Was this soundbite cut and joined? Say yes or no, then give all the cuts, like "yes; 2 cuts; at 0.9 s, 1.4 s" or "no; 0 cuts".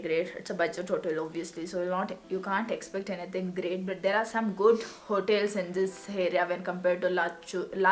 no; 0 cuts